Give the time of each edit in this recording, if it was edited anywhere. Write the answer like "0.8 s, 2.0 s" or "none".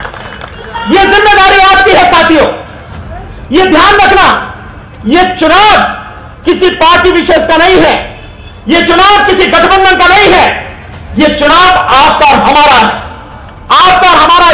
none